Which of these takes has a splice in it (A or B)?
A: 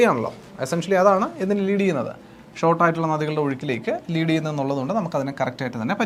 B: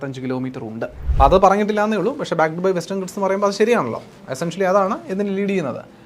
B